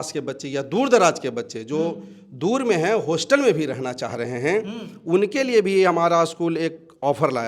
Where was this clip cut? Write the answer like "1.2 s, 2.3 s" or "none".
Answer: none